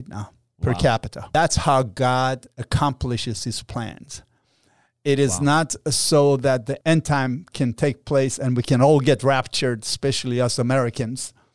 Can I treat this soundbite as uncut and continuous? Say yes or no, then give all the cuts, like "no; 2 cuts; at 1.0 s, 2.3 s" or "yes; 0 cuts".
no; 2 cuts; at 1.2 s, 6.8 s